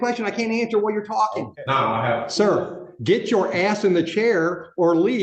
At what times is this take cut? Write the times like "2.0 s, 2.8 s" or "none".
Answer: 1.6 s